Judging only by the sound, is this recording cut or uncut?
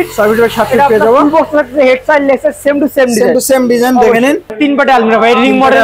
cut